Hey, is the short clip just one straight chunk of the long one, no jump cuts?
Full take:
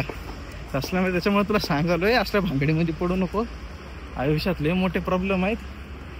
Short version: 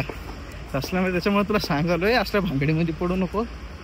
yes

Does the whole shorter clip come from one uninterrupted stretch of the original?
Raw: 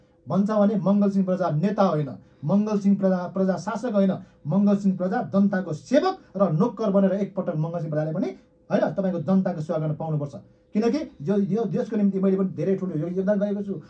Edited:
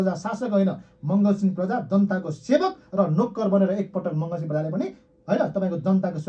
yes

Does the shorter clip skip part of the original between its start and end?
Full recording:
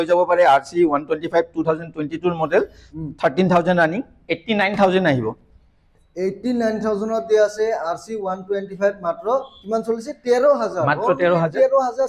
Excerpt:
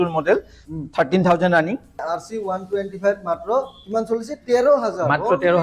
yes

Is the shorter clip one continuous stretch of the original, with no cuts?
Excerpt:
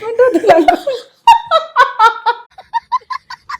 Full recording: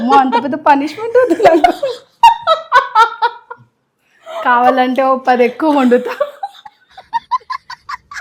no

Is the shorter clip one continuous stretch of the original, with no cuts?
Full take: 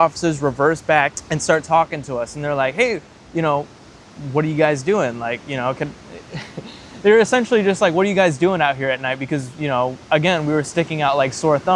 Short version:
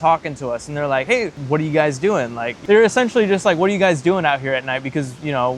no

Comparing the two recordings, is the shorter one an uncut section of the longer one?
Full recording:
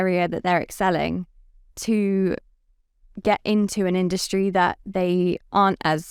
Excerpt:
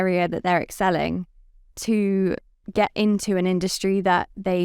no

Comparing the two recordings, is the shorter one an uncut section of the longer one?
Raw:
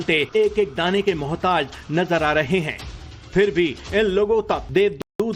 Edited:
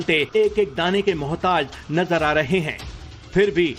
yes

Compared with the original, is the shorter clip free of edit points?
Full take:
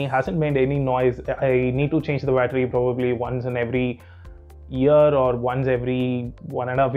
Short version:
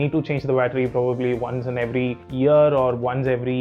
no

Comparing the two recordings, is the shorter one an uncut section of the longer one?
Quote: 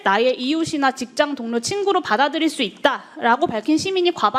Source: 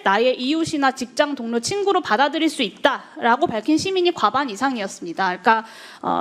yes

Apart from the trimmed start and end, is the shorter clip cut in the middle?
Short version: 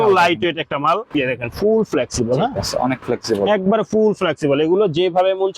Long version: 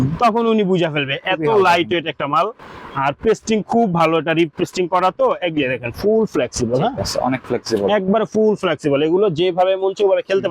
yes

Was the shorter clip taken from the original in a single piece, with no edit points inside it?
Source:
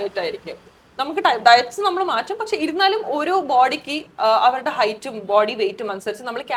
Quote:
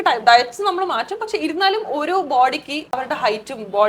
no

